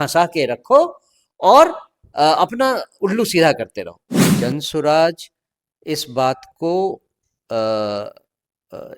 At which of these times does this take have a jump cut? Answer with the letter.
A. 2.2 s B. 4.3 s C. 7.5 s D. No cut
B